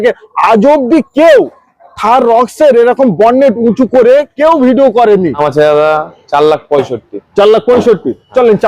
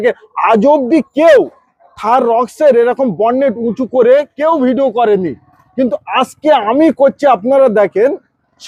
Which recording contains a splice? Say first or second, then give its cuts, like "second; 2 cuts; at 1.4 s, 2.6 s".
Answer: first; 1 cut; at 5.4 s